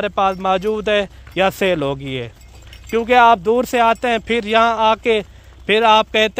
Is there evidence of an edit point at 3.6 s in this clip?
no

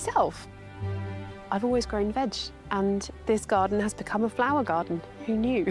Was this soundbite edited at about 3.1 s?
yes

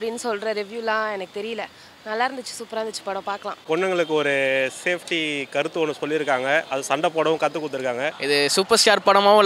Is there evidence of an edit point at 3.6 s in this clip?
yes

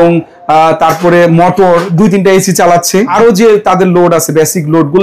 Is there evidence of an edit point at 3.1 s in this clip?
yes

